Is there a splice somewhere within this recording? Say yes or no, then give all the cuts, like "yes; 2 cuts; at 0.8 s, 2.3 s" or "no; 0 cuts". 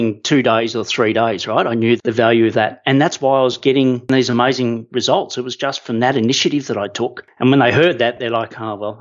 no; 0 cuts